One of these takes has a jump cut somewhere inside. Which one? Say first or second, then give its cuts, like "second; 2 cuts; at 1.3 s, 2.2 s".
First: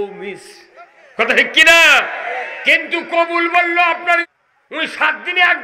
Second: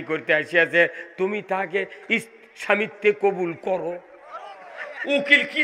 first; 1 cut; at 4.4 s